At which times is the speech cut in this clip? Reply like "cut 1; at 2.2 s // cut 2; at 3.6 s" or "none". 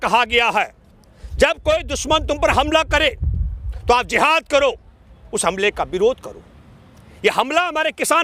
none